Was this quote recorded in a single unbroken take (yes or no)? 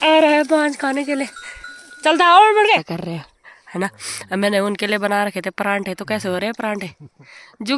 no